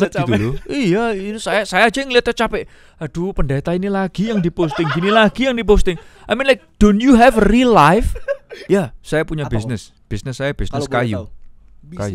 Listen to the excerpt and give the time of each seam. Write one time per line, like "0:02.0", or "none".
0:08.1